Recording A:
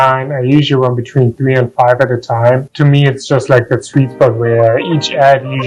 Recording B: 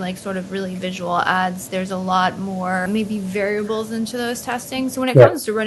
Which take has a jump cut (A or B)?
B